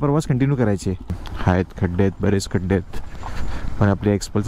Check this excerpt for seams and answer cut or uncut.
cut